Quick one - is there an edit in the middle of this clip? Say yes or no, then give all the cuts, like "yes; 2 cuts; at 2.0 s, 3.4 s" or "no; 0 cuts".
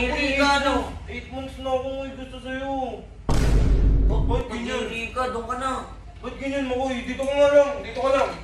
yes; 2 cuts; at 3.1 s, 4.2 s